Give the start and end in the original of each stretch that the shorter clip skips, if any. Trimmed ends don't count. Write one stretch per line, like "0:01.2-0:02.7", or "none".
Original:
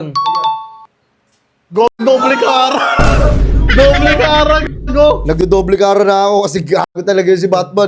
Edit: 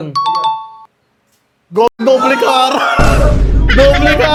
none